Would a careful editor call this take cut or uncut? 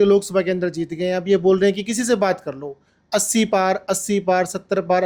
uncut